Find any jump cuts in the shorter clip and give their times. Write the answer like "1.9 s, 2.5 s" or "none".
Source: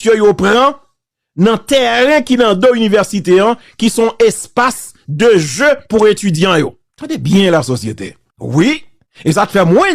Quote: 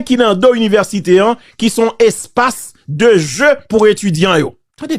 none